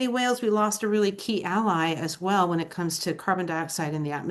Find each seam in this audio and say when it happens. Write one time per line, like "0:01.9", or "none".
none